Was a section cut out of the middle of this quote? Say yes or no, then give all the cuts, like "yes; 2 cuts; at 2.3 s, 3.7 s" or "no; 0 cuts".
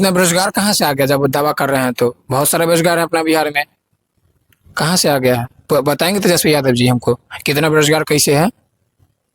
no; 0 cuts